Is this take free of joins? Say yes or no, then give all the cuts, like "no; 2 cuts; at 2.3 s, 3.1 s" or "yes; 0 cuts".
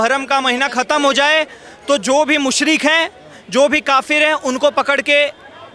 yes; 0 cuts